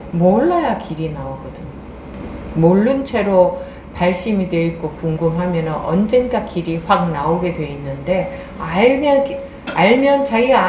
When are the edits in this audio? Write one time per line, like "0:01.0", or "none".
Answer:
0:02.1

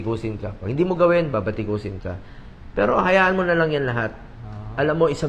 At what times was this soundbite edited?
none

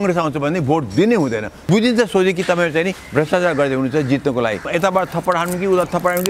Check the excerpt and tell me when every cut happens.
0:01.5
0:04.6

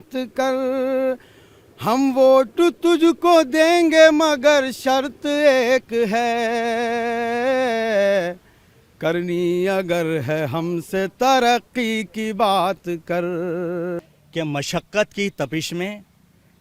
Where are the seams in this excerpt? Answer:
0:14.1

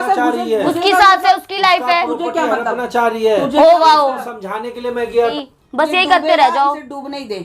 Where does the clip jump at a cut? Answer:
0:05.3

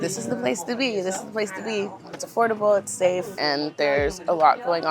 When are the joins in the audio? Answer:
0:02.2
0:03.3

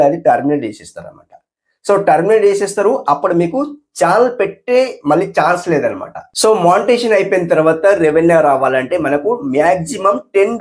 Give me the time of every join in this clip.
0:06.3

